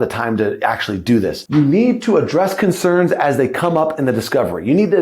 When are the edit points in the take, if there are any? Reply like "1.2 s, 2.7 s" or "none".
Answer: 1.4 s

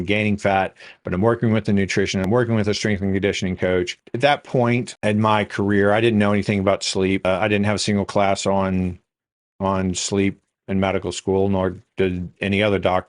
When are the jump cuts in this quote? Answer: 2.3 s, 4.0 s, 4.9 s, 7.2 s

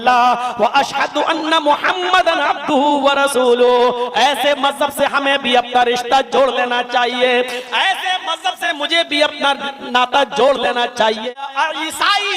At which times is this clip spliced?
11.4 s

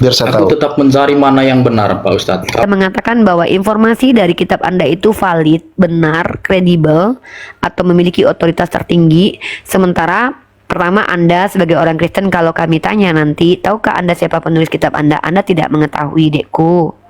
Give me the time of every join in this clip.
2.6 s

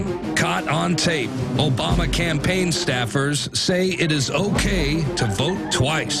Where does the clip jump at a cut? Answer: none

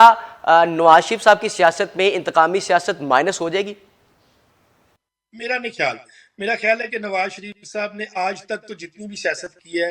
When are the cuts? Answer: none

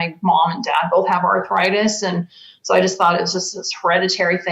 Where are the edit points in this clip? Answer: none

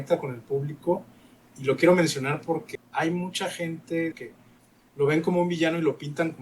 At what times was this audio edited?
2.7 s, 4.2 s

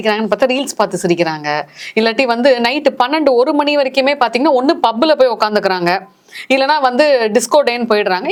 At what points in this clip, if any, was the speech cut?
none

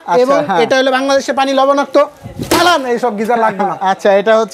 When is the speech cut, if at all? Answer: none

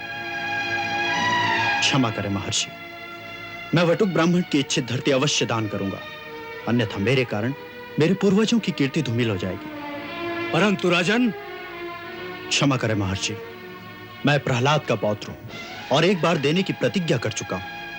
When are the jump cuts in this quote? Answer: none

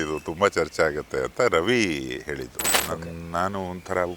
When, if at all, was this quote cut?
2.7 s

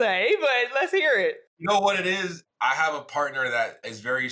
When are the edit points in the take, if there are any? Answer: 1.5 s, 2.4 s

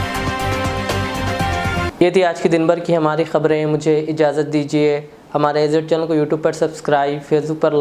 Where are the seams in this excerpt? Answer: none

